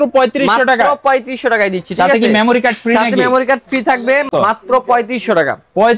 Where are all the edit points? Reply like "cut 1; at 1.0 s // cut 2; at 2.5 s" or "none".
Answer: cut 1; at 4.3 s